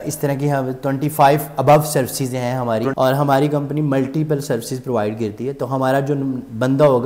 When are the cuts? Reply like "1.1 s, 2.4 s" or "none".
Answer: 2.9 s